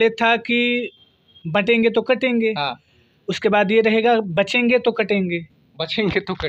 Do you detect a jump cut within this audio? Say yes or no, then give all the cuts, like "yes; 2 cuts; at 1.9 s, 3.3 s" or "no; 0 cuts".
no; 0 cuts